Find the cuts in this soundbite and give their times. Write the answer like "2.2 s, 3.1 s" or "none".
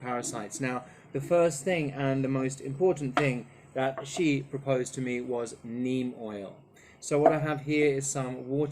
none